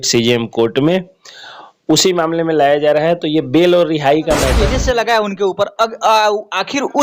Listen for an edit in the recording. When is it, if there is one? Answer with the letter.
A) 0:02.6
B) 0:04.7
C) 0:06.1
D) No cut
B